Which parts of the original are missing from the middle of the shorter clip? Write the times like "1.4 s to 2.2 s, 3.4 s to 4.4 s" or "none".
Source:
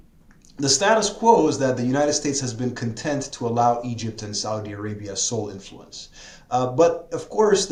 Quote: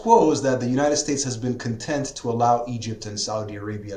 none